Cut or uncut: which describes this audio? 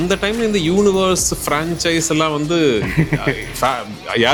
uncut